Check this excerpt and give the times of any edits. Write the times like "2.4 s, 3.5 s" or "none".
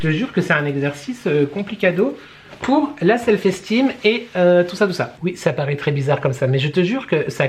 5.1 s